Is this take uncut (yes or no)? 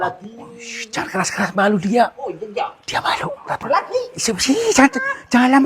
no